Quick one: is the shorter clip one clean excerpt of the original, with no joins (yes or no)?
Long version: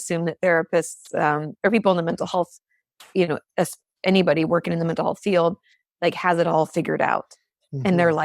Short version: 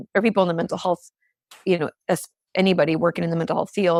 yes